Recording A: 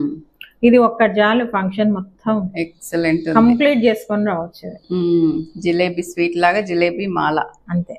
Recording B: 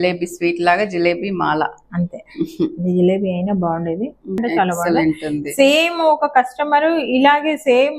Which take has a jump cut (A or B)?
B